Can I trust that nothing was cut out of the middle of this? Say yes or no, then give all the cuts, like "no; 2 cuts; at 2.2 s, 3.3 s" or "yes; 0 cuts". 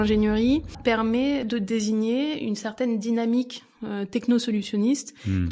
no; 2 cuts; at 0.8 s, 1.4 s